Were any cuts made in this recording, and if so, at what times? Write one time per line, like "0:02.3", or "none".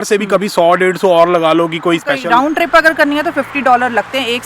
0:02.2